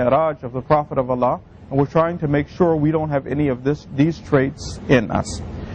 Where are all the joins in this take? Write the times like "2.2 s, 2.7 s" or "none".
4.6 s